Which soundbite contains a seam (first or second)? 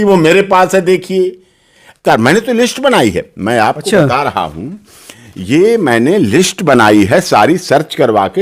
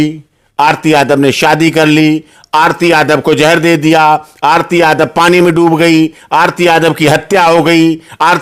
first